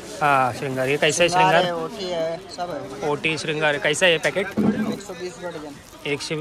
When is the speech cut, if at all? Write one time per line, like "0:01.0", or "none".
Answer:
none